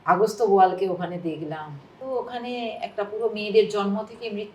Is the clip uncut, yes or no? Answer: yes